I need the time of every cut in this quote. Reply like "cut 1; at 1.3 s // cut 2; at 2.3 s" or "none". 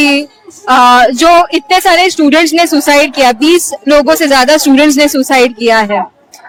none

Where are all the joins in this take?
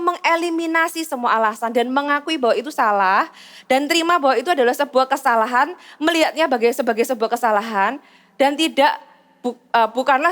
none

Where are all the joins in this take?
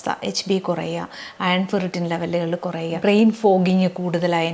cut 1; at 2.9 s

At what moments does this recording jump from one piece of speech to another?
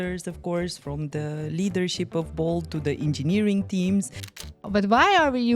cut 1; at 4.5 s

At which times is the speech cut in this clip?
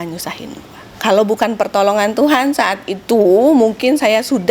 cut 1; at 0.9 s

